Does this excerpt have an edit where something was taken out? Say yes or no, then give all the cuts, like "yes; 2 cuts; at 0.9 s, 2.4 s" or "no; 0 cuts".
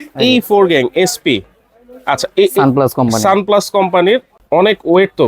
yes; 1 cut; at 4.3 s